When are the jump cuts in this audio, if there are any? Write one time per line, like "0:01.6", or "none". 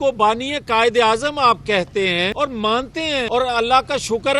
0:02.3
0:03.3